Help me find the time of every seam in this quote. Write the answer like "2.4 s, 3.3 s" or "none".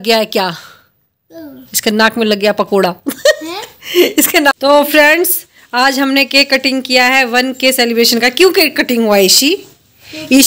4.5 s